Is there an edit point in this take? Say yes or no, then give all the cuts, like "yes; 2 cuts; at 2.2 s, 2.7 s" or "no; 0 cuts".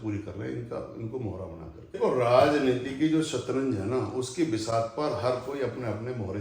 yes; 1 cut; at 2.0 s